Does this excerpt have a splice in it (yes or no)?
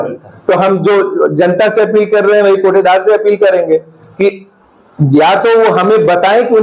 no